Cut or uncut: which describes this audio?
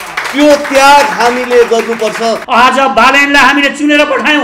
cut